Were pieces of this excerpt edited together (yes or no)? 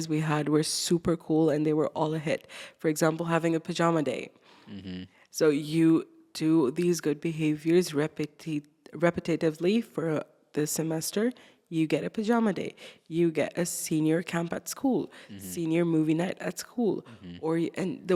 no